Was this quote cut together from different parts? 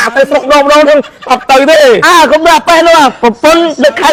no; 0 cuts

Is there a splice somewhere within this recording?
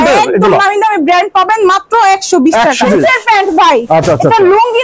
yes; 1 cut; at 2.9 s

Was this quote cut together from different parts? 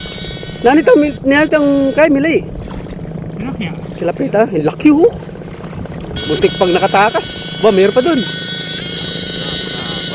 no; 0 cuts

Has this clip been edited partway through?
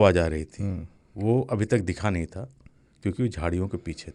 no; 0 cuts

